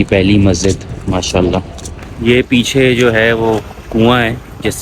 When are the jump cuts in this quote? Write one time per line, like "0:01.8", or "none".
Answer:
0:02.1

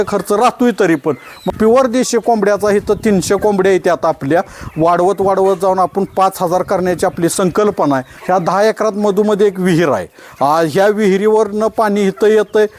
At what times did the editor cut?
0:01.5
0:08.1

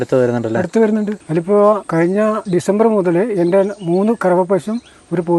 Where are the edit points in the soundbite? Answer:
0:01.2
0:02.1

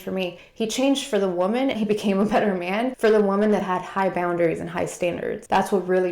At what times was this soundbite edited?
0:01.8

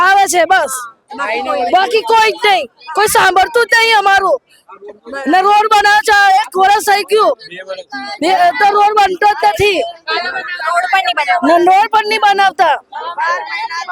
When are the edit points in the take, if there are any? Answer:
none

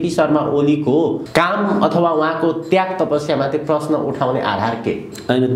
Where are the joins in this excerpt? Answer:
0:01.2

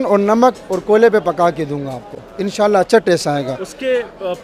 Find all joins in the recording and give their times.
none

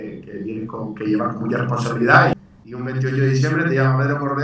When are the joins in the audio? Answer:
0:02.4

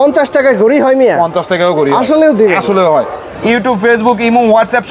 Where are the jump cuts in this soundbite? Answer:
0:03.3

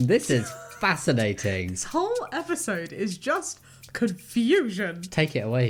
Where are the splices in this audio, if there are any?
none

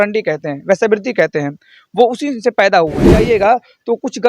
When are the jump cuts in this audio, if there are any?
0:03.1

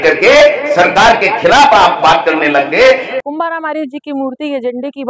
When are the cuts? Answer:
0:03.2

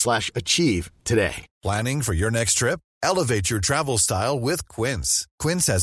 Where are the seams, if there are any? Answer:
0:01.5

